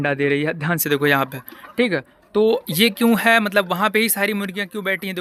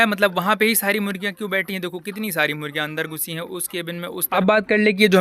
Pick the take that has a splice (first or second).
second